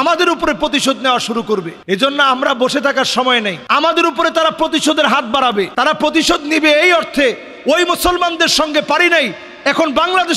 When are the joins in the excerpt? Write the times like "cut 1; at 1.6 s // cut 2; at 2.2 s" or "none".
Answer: none